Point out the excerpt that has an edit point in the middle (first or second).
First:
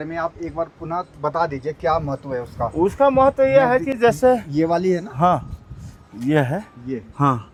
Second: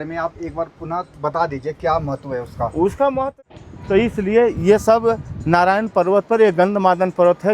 second